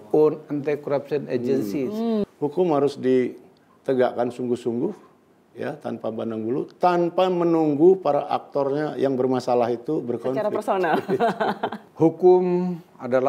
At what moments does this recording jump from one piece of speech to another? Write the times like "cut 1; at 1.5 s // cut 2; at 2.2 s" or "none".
cut 1; at 2.2 s // cut 2; at 11.8 s